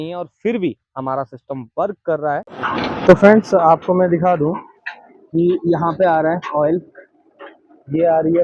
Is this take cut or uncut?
cut